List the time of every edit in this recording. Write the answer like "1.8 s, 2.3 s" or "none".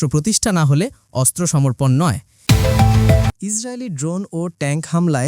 2.3 s